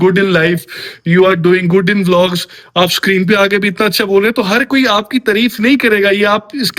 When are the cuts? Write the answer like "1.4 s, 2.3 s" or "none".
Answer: none